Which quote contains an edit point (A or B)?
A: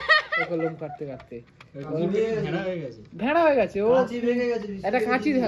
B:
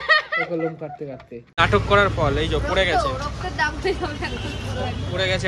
B